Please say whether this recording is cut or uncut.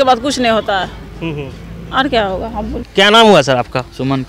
uncut